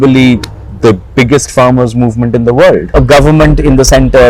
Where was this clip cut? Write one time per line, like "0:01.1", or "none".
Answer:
0:02.9